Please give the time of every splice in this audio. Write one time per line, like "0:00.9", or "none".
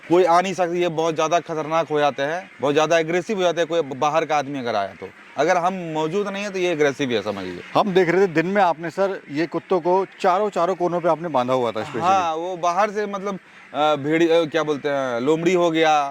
none